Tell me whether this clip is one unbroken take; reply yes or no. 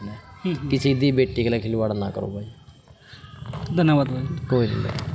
yes